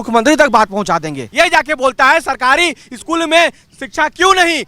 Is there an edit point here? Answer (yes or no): yes